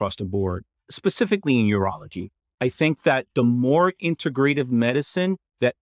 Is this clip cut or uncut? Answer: cut